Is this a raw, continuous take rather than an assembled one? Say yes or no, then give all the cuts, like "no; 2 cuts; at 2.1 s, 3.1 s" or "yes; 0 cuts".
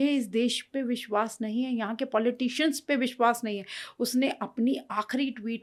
yes; 0 cuts